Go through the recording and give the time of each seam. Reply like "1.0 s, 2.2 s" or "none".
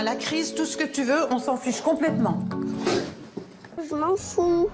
3.8 s